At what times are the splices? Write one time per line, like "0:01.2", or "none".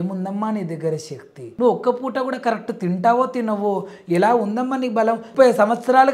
0:01.4
0:05.3